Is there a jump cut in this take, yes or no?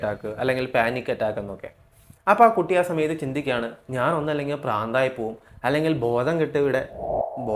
no